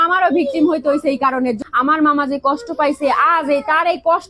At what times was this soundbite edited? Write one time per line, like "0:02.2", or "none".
0:01.6